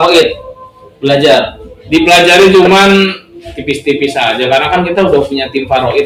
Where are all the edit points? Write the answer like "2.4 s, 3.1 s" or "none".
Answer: none